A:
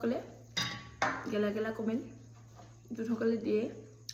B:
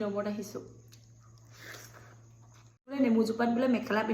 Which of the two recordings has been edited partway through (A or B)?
B